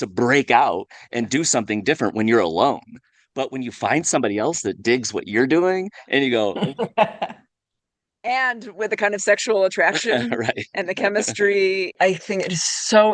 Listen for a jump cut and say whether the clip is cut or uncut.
cut